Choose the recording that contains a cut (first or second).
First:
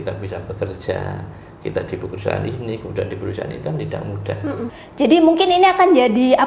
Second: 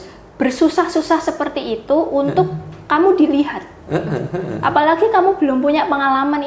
first